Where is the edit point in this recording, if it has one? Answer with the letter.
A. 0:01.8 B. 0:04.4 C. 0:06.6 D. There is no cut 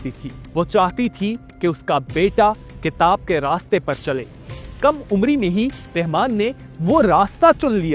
B